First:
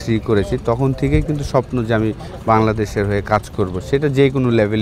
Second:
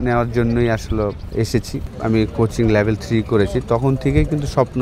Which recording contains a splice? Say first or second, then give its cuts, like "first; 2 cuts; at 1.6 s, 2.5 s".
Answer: second; 1 cut; at 1.5 s